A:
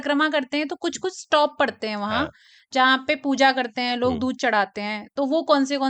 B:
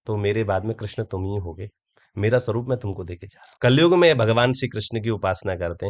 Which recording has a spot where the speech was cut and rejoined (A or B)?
B